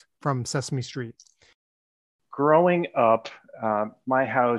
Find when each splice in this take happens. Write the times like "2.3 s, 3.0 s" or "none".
1.9 s

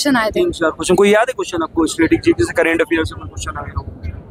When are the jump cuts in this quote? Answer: none

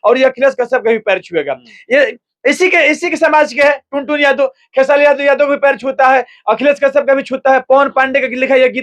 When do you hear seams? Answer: none

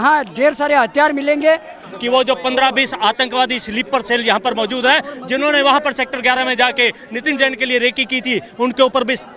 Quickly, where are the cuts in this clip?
1.8 s

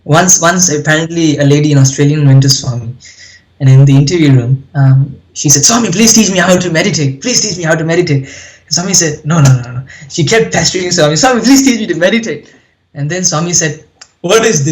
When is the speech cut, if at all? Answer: none

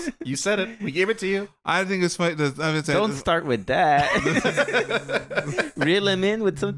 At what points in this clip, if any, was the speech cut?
none

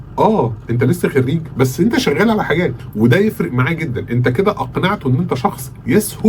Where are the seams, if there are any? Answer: 2.8 s

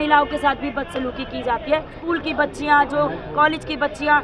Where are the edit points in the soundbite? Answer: 1.9 s

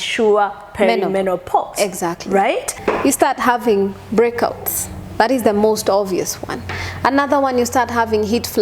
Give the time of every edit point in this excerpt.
2.7 s

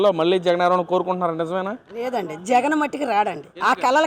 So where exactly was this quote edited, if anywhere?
none

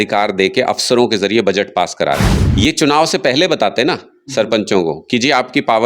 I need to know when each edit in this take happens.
2.4 s

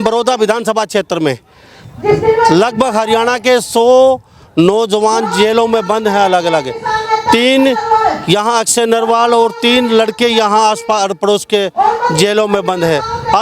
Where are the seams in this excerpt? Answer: none

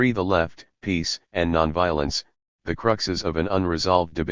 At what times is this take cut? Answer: none

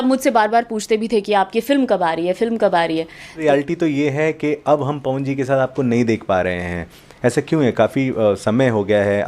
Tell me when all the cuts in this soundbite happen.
3.4 s

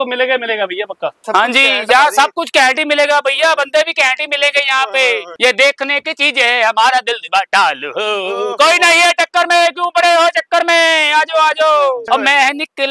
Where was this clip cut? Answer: 1.2 s, 5.4 s, 12.0 s

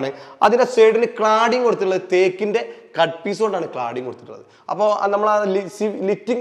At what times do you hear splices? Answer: none

